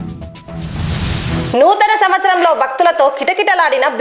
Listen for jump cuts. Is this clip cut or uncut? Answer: cut